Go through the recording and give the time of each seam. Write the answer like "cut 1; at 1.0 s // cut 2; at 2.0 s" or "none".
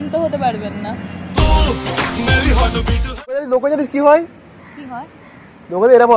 cut 1; at 3.6 s